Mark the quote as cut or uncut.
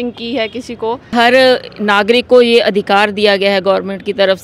cut